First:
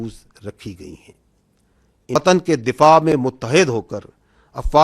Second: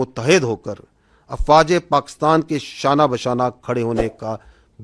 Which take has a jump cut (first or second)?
first